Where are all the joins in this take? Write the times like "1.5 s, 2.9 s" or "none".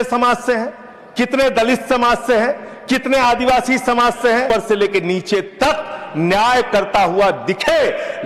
4.5 s